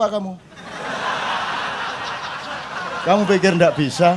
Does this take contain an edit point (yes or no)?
no